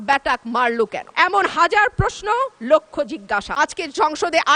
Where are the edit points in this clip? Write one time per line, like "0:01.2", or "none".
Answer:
0:03.5